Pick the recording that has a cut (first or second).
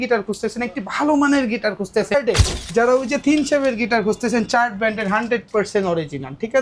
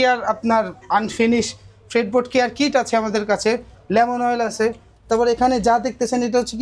first